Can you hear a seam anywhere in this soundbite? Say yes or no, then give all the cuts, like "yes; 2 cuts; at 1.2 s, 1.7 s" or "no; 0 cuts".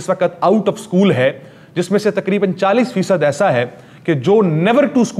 no; 0 cuts